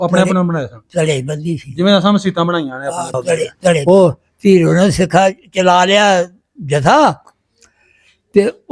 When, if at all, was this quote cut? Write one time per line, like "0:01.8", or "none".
0:03.8